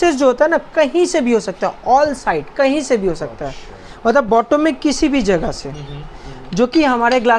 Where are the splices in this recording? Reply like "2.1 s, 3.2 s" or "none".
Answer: none

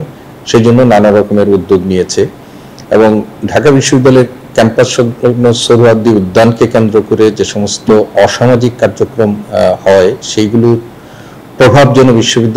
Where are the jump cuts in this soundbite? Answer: none

